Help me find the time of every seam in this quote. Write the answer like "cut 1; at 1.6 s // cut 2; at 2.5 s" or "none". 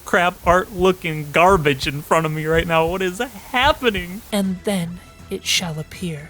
cut 1; at 4.2 s